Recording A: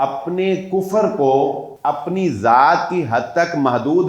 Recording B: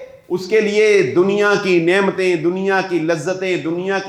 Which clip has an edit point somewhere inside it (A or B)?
A